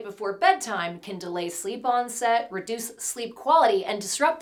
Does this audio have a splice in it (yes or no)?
no